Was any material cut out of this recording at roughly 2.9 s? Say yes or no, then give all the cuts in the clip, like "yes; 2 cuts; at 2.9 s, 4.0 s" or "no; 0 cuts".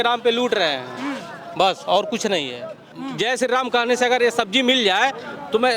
yes; 1 cut; at 2.9 s